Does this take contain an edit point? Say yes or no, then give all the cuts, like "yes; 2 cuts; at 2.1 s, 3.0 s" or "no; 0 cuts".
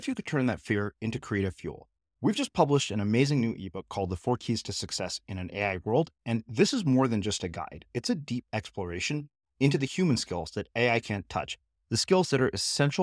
no; 0 cuts